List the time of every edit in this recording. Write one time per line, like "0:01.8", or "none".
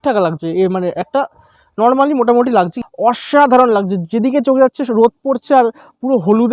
0:02.8